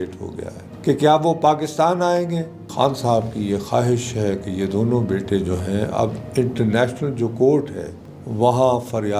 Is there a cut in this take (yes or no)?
yes